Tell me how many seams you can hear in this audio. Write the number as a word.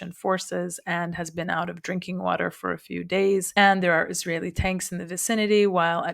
one